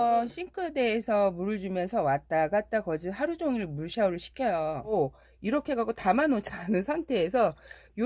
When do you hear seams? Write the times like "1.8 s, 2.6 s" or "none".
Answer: 4.9 s